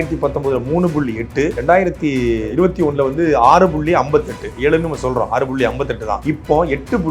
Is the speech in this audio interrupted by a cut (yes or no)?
yes